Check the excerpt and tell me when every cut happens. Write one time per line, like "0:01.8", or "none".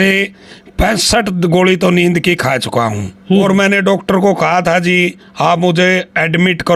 0:03.4